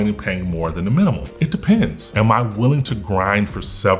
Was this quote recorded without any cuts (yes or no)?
no